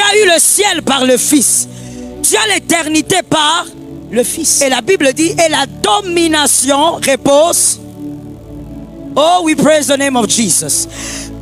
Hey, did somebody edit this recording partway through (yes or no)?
yes